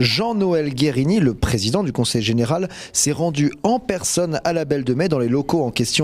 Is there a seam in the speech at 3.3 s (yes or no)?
yes